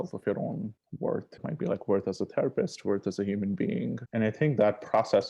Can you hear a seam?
yes; 2 cuts; at 1.4 s, 4.0 s

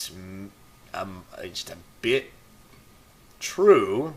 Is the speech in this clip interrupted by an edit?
no; 0 cuts

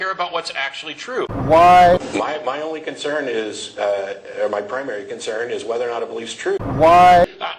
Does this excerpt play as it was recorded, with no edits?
yes; 0 cuts

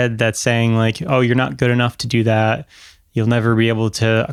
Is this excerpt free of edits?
yes; 0 cuts

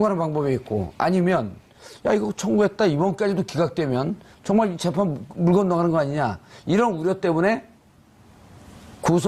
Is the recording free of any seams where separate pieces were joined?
yes; 0 cuts

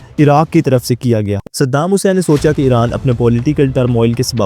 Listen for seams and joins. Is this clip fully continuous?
no; 1 cut; at 1.4 s

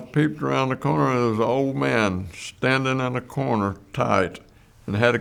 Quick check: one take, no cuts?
yes; 0 cuts

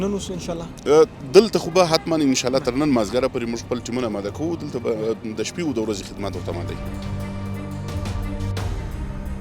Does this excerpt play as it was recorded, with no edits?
no; 1 cut; at 6.8 s

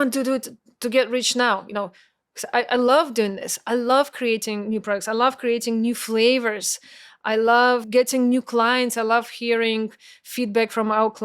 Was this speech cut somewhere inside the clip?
yes; 1 cut; at 7.9 s

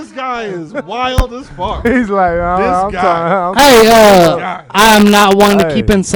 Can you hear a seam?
no; 0 cuts

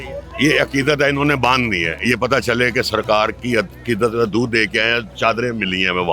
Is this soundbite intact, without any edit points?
no; 1 cut; at 5.1 s

